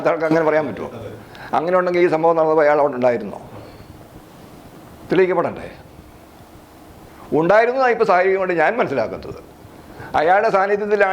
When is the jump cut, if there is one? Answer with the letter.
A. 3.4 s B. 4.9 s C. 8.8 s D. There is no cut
D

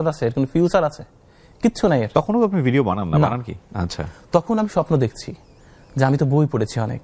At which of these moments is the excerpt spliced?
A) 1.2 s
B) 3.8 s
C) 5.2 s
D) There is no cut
D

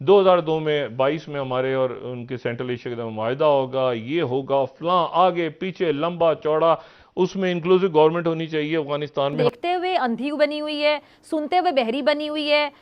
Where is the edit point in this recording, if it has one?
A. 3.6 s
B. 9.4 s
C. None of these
B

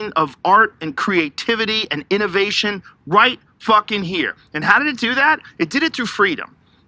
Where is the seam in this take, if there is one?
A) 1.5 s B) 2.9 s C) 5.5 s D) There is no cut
D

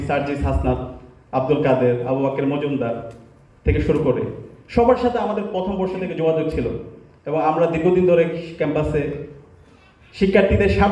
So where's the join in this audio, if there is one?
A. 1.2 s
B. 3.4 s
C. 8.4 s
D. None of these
D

